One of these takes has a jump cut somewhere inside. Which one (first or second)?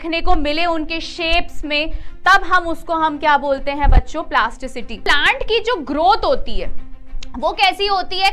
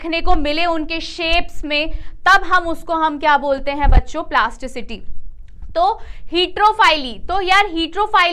first